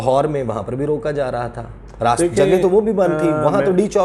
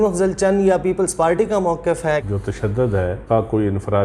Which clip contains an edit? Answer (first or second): second